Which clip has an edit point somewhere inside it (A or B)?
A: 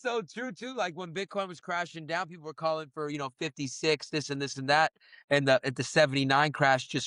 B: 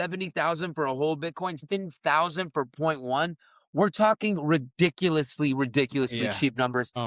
B